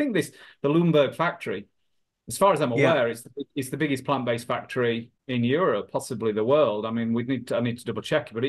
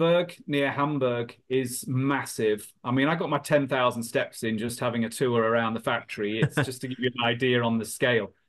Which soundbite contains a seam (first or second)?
first